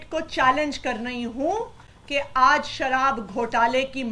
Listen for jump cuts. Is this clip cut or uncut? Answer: uncut